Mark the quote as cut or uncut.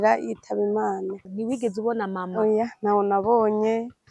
cut